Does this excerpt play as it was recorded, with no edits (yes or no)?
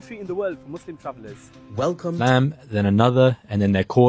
no